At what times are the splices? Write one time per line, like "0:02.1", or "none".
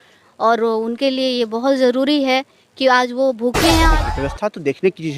0:04.0